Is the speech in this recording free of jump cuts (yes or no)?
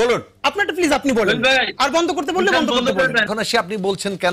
no